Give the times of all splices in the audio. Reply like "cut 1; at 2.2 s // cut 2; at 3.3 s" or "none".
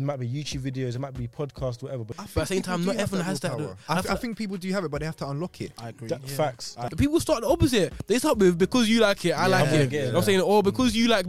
cut 1; at 2.2 s // cut 2; at 6.9 s